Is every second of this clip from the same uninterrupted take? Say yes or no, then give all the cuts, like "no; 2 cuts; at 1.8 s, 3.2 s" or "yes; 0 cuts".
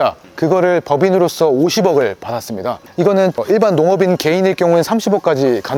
yes; 0 cuts